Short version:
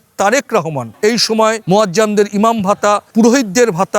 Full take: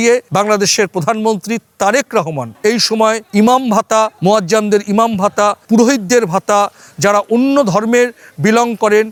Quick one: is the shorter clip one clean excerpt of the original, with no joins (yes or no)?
no